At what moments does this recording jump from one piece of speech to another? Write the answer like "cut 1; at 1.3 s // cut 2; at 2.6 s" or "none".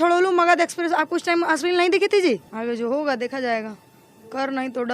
cut 1; at 2.5 s

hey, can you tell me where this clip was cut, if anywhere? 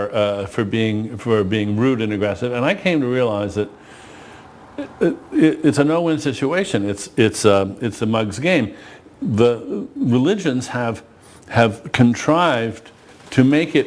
cut 1; at 2.2 s

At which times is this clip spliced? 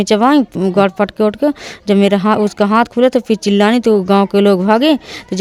none

